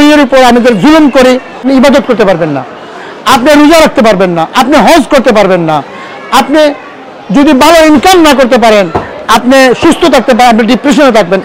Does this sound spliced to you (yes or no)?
yes